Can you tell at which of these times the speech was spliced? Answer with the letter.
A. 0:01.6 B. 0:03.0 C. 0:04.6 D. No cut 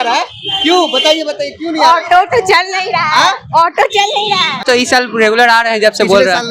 C